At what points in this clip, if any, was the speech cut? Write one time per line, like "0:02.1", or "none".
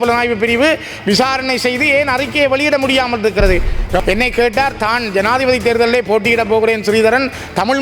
0:04.0